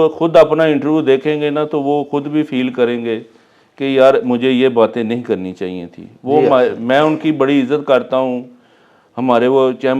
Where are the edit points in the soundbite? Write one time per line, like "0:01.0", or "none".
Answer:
none